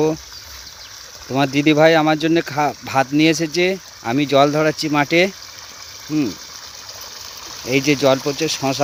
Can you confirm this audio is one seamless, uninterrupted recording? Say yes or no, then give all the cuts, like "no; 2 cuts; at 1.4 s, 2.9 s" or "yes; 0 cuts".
yes; 0 cuts